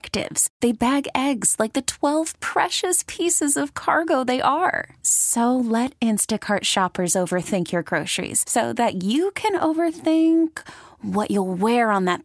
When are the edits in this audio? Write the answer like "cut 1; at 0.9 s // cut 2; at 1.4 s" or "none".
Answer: none